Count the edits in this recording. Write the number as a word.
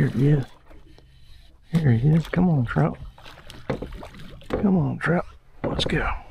zero